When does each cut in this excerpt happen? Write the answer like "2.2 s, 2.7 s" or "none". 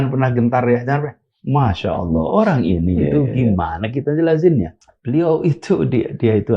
4.8 s